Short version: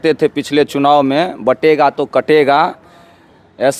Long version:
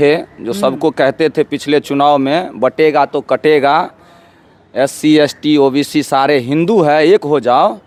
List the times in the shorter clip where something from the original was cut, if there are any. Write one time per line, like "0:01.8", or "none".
none